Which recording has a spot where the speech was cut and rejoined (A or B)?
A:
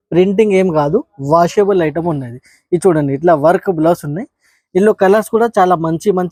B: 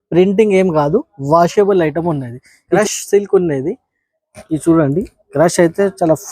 B